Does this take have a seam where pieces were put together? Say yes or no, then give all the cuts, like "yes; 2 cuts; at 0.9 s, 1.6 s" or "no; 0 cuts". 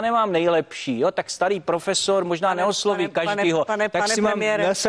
no; 0 cuts